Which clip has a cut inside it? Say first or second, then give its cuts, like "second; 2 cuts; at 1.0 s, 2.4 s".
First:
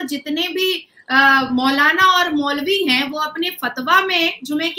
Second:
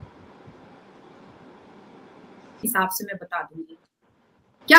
second; 1 cut; at 2.6 s